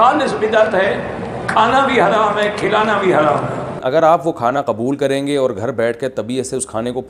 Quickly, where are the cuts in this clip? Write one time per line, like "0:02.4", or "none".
0:03.8